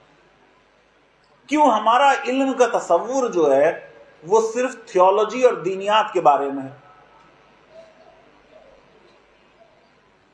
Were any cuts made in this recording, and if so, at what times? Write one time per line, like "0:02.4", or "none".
none